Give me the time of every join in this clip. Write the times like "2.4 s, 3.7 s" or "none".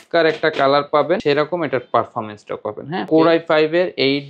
1.2 s, 3.1 s